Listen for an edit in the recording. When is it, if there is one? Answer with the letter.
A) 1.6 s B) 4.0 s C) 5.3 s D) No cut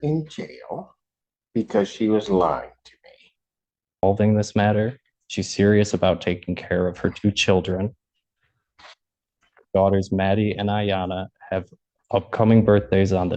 B